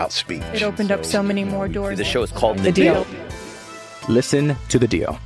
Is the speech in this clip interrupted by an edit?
no; 0 cuts

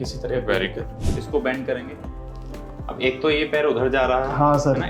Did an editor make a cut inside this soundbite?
yes; 1 cut; at 1.2 s

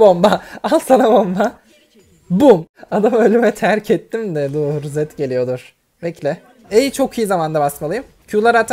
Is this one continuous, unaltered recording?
no; 1 cut; at 2.7 s

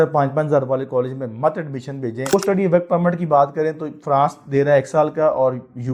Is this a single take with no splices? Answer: no; 1 cut; at 2.3 s

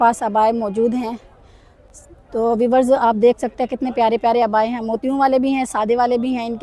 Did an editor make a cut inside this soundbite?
no; 0 cuts

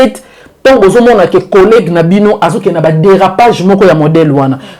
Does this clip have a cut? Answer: no; 0 cuts

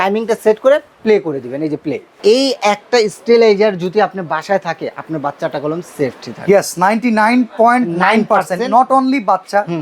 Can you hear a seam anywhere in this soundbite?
yes; 1 cut; at 2.2 s

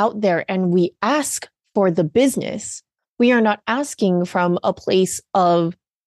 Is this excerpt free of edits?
yes; 0 cuts

